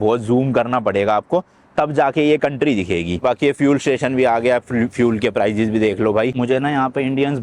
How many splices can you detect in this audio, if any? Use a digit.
2